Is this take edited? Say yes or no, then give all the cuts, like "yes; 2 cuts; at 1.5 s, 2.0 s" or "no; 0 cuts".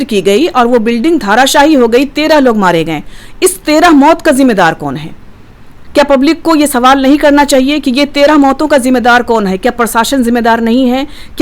no; 0 cuts